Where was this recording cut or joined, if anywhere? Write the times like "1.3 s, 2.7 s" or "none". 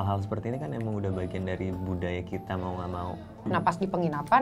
3.5 s